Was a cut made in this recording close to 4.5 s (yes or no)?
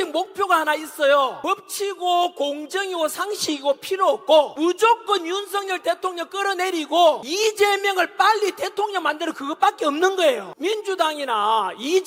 yes